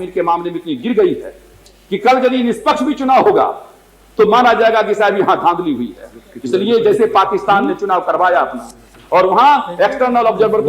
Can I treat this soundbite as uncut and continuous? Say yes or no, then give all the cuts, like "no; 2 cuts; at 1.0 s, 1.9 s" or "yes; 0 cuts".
yes; 0 cuts